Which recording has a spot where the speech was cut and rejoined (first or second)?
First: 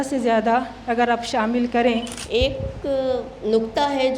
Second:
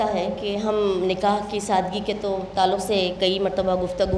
first